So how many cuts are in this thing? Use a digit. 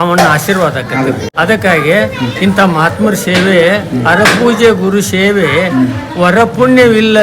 1